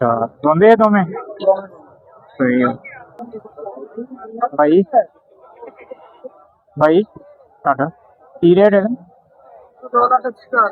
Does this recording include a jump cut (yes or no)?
yes